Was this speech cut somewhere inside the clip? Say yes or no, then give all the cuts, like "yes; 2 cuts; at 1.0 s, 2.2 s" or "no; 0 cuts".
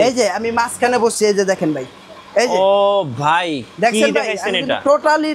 no; 0 cuts